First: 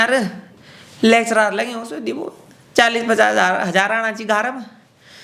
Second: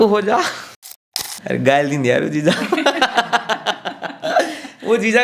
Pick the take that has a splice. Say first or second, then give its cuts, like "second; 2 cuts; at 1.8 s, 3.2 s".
second; 1 cut; at 1.2 s